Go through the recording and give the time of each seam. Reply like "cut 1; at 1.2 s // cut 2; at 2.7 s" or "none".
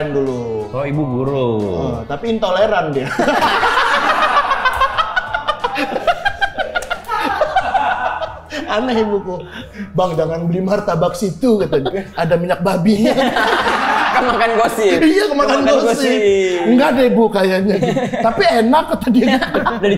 none